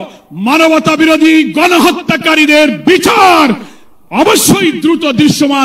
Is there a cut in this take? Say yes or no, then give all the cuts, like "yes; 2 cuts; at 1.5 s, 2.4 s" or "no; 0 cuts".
no; 0 cuts